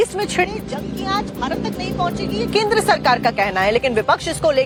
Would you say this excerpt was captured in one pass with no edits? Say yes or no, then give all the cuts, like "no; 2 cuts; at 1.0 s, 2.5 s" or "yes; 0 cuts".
yes; 0 cuts